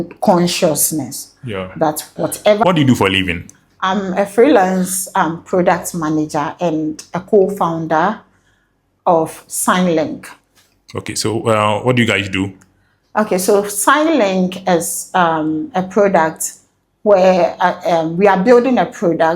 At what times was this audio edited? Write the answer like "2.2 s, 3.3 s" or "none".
2.6 s